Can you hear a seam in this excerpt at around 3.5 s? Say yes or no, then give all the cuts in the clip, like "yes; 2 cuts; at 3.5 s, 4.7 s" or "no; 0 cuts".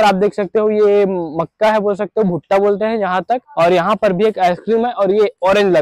yes; 1 cut; at 3.5 s